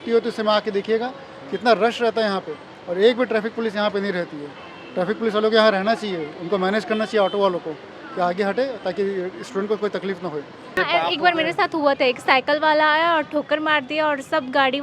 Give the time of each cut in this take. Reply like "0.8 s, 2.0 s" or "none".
10.8 s